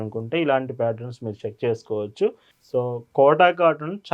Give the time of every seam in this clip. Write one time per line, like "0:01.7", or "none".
0:02.5